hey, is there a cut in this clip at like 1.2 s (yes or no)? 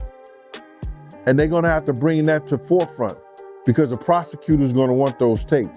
yes